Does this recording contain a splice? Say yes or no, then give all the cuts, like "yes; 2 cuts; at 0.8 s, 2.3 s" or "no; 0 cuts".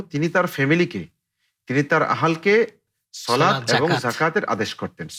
no; 0 cuts